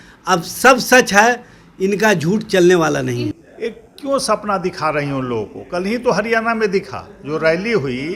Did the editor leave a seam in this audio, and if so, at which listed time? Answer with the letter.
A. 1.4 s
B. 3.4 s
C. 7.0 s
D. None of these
B